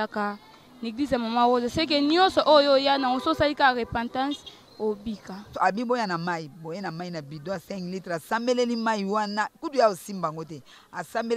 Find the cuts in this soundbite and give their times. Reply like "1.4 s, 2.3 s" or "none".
5.5 s